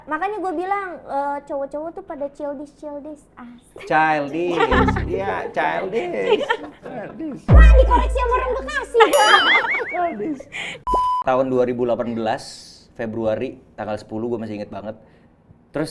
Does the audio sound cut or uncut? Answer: cut